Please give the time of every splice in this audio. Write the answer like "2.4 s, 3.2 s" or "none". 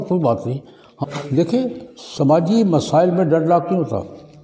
0.9 s